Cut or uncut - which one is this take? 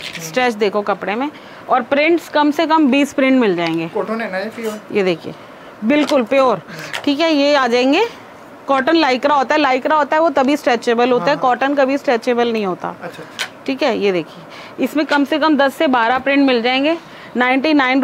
uncut